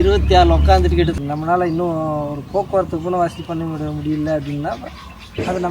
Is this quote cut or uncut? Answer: cut